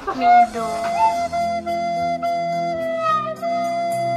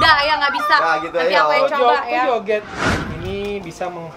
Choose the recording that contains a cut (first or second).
second